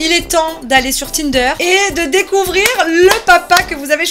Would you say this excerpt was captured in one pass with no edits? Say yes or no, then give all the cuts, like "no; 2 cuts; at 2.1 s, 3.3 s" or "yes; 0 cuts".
no; 1 cut; at 1.6 s